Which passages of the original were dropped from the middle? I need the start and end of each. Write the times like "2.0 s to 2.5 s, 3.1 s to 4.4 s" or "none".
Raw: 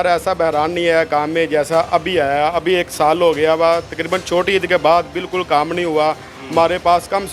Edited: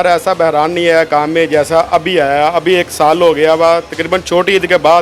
none